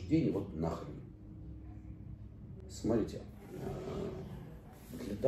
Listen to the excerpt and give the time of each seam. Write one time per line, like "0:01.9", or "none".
none